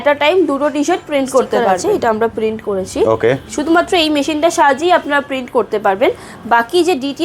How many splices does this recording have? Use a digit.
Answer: 1